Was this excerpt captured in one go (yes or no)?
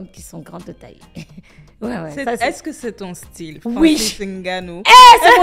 yes